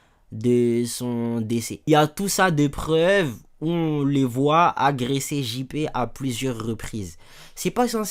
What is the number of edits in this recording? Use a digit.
1